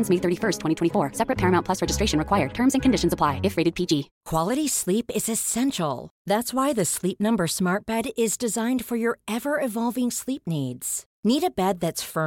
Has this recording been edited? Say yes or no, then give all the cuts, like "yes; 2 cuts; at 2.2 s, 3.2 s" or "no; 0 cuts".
no; 0 cuts